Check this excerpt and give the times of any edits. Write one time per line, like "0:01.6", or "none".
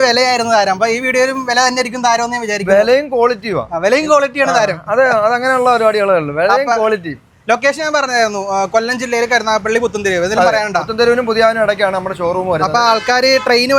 none